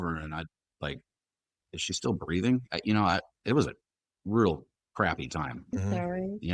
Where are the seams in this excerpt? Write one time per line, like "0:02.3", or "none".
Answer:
none

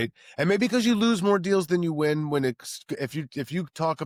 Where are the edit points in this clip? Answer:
none

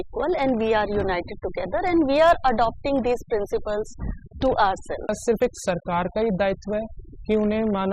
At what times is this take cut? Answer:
0:05.1

